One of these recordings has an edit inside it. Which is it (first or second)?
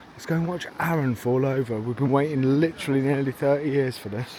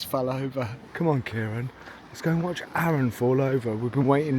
second